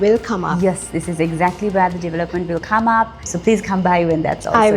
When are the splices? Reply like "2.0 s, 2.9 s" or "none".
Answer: 3.3 s